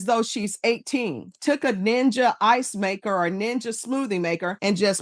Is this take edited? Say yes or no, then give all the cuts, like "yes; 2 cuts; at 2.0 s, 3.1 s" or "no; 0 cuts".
yes; 1 cut; at 1.3 s